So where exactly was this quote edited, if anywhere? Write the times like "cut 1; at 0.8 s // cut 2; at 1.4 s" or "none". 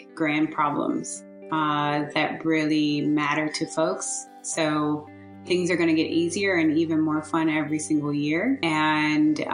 cut 1; at 8.6 s